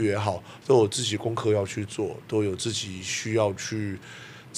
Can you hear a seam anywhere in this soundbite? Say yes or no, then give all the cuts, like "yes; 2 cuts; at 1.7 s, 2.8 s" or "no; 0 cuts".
no; 0 cuts